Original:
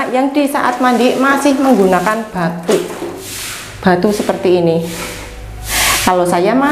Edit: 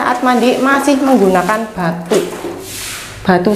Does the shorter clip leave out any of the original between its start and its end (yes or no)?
no